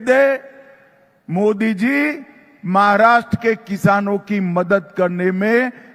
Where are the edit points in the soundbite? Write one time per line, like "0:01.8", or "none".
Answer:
none